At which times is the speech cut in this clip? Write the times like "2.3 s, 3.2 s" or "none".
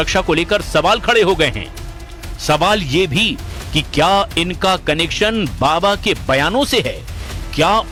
none